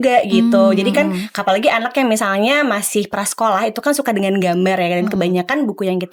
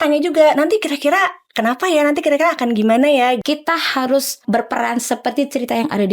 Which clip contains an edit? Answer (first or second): second